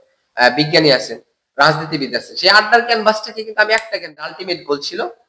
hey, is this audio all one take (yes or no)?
no